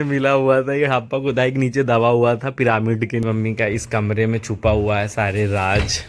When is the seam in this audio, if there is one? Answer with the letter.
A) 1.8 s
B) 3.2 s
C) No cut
B